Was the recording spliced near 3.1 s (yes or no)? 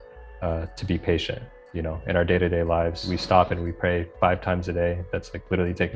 yes